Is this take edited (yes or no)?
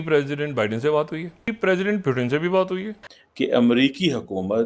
yes